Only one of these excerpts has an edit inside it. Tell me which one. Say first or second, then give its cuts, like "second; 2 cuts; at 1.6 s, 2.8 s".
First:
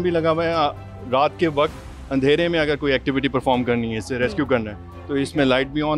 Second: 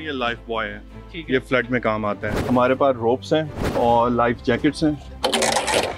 second; 3 cuts; at 2.3 s, 3.7 s, 5.1 s